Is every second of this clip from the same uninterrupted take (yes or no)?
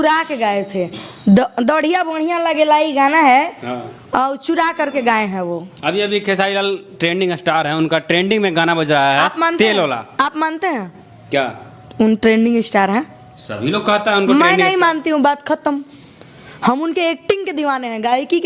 yes